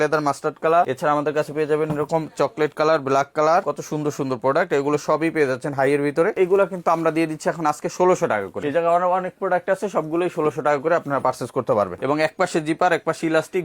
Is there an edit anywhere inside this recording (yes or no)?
yes